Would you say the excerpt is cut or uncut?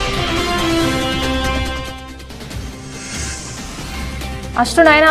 uncut